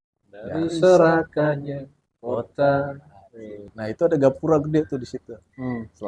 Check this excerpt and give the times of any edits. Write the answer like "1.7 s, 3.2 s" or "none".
3.8 s